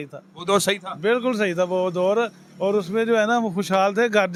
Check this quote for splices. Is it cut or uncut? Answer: uncut